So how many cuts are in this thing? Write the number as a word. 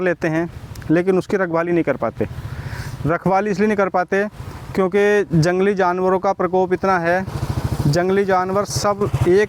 zero